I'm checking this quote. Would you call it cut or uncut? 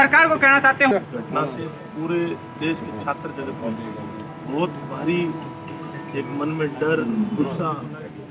cut